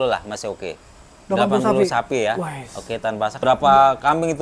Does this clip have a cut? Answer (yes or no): yes